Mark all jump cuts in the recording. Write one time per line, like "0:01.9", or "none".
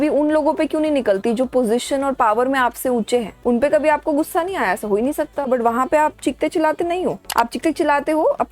0:03.3
0:05.5
0:07.2

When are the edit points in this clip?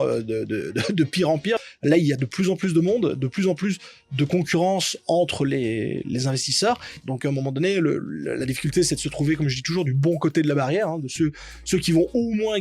0:01.6
0:07.1

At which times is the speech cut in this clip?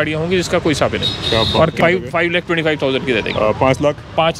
0:01.8

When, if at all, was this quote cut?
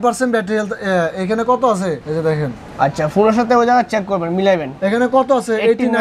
none

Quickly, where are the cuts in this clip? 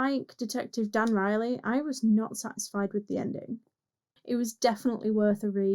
0:04.1

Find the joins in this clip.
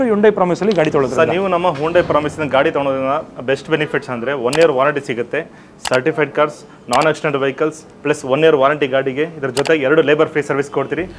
none

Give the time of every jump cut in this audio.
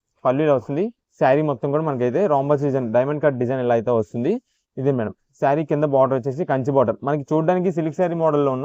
none

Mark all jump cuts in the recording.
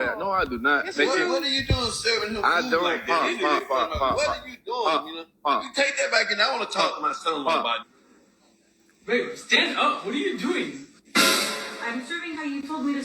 0:04.6

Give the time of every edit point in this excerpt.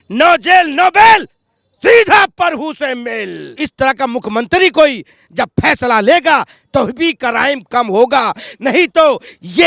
0:03.6

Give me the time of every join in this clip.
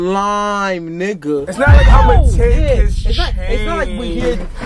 none

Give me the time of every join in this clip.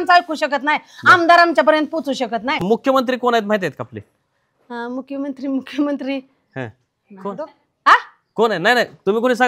0:02.6

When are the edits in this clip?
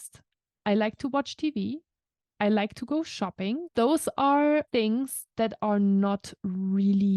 0:03.7
0:04.7

